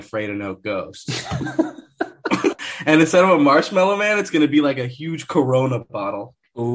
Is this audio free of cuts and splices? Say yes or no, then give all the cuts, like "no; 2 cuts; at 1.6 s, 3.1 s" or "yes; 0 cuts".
no; 1 cut; at 2.7 s